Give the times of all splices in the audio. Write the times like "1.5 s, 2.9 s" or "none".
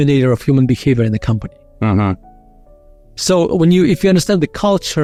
none

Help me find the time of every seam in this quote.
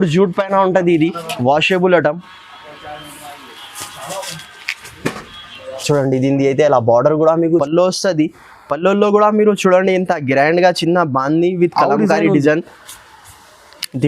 7.6 s

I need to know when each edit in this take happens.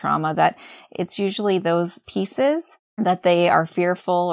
2.0 s, 2.8 s

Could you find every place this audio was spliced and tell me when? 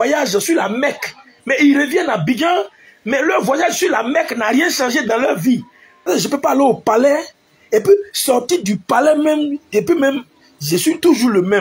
6.1 s

